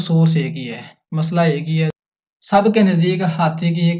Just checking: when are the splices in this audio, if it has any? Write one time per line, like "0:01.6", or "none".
0:02.0